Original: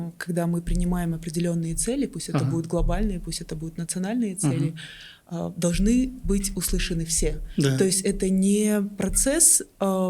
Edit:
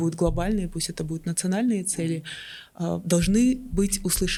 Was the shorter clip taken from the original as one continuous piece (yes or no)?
yes